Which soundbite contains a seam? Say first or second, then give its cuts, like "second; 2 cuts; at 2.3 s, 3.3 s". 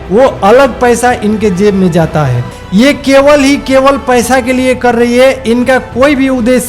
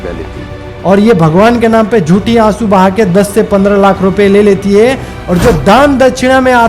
first; 1 cut; at 2.5 s